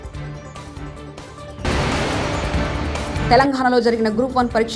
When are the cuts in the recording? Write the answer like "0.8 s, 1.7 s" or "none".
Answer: none

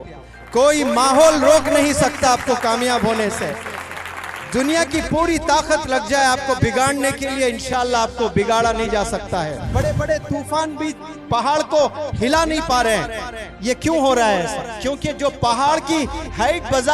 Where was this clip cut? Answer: 9.7 s

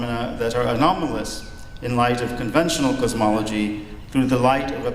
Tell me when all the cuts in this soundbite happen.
0.9 s

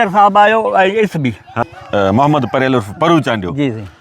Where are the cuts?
1.6 s

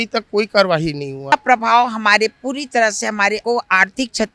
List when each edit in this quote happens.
1.3 s, 3.4 s

